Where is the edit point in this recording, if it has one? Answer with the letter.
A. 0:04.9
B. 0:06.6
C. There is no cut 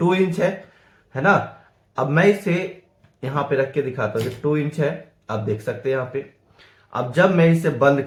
C